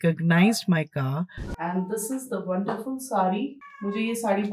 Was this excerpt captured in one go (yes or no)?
no